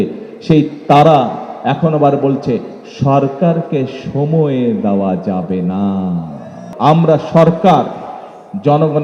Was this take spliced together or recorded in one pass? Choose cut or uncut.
cut